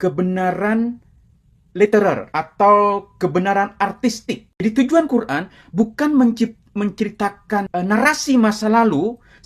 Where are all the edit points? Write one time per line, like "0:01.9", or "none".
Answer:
0:02.3
0:04.6
0:07.7